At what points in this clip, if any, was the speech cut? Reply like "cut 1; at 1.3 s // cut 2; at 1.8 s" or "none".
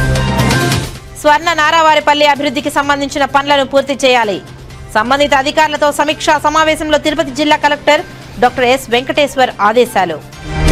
none